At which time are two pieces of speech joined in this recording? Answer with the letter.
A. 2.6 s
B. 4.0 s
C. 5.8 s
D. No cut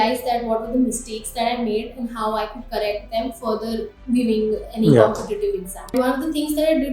C